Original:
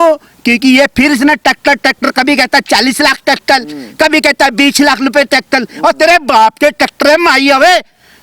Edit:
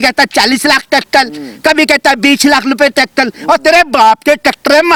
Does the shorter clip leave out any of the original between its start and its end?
no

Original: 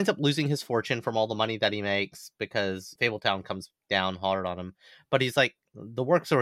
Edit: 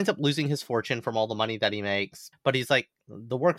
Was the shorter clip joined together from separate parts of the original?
yes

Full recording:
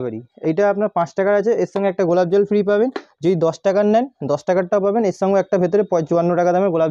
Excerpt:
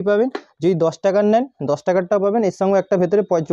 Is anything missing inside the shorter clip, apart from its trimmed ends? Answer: no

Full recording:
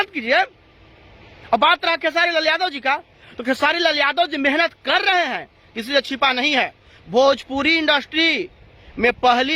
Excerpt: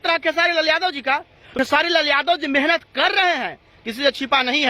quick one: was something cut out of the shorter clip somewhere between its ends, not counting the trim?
yes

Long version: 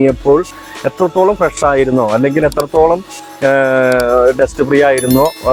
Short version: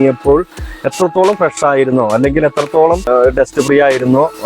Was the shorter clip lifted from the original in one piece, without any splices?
no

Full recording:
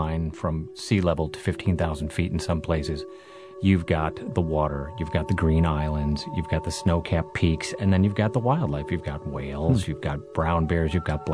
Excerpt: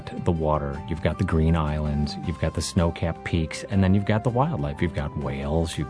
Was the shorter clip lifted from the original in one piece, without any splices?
yes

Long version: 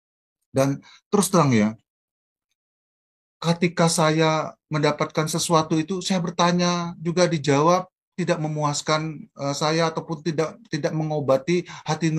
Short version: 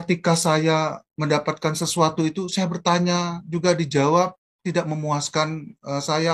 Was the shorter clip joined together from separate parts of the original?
no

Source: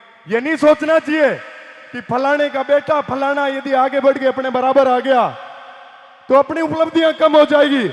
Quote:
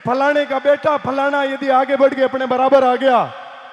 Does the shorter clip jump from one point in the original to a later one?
no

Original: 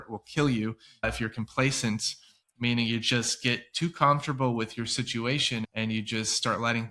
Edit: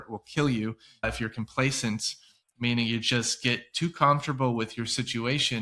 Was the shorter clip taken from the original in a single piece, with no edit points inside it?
yes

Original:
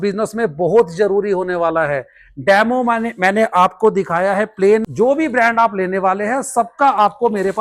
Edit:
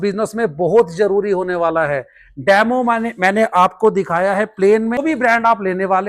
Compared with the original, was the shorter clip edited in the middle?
yes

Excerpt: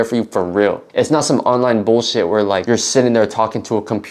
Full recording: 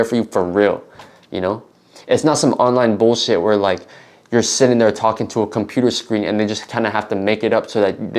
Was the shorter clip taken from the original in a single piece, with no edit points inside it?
no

